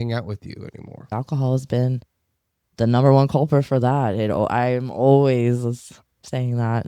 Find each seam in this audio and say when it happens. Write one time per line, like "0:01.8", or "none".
0:01.1